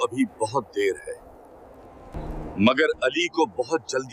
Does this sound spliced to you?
yes; 1 cut; at 2.1 s

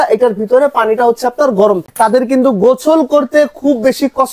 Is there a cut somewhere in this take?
yes; 1 cut; at 1.9 s

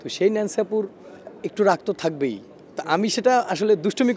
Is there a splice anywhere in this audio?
no; 0 cuts

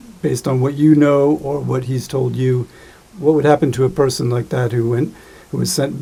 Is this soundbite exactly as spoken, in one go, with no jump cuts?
yes; 0 cuts

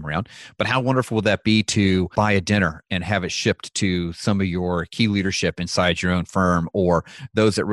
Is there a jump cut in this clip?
yes; 1 cut; at 2.1 s

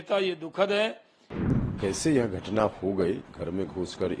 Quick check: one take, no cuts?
no; 1 cut; at 1.5 s

